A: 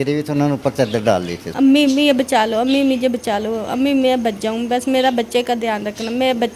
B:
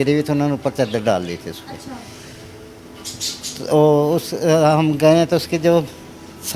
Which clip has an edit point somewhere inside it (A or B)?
A